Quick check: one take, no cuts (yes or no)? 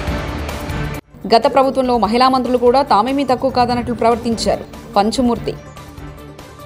no